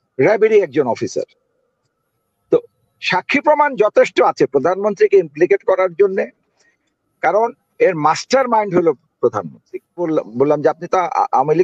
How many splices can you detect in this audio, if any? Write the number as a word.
one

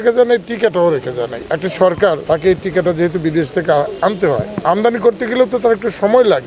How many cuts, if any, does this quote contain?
three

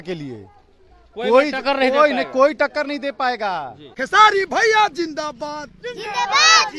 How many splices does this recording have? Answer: one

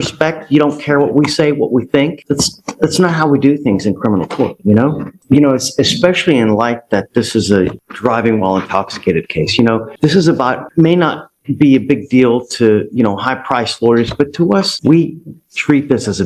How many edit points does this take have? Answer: zero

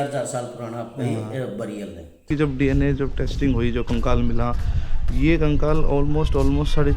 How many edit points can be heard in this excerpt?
one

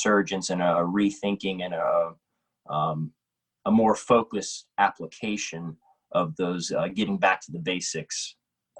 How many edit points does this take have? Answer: zero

